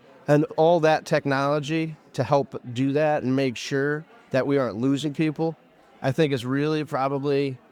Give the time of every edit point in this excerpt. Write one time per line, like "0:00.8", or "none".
none